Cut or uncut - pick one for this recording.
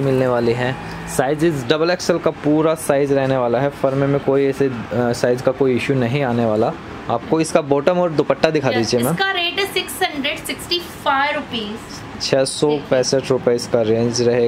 uncut